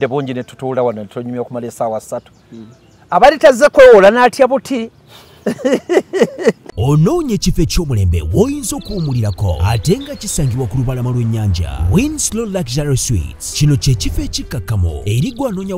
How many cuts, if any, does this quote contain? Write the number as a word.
one